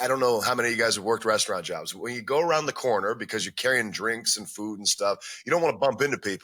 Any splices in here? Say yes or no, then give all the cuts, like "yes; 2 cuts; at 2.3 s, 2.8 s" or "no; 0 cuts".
no; 0 cuts